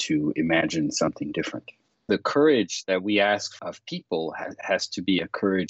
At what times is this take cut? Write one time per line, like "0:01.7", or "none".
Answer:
0:02.1
0:03.5